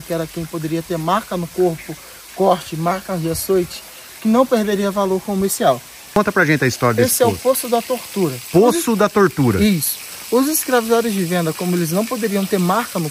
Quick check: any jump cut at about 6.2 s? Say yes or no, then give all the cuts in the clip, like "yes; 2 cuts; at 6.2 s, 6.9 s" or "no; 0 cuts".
yes; 1 cut; at 6.2 s